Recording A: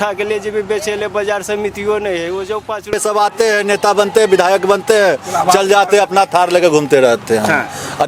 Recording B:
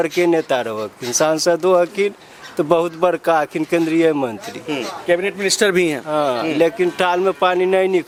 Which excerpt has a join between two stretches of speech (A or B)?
A